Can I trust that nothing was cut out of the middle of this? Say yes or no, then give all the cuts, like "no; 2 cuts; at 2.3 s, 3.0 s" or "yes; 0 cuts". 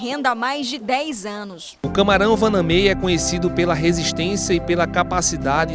no; 1 cut; at 1.8 s